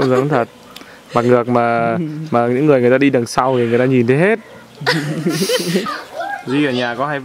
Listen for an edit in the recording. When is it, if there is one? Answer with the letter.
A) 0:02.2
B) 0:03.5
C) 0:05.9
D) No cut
C